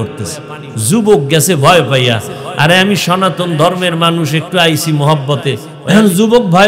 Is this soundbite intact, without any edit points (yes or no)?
no